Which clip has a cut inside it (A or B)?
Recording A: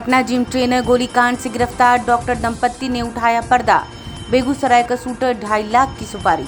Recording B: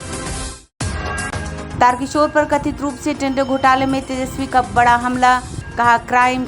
B